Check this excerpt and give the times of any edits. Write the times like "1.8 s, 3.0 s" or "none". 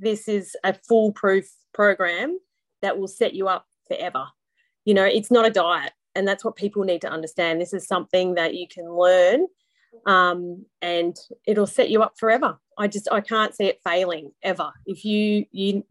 none